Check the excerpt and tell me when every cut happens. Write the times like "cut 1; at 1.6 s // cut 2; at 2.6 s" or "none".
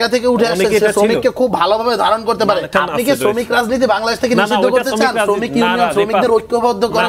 cut 1; at 2.7 s